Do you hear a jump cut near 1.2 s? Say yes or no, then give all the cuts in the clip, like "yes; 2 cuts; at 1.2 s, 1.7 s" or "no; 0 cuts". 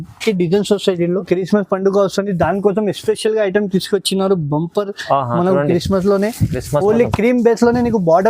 yes; 1 cut; at 1.2 s